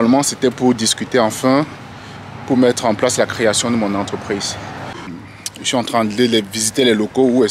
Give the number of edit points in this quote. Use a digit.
1